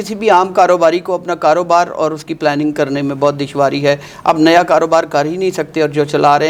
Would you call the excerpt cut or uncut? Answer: uncut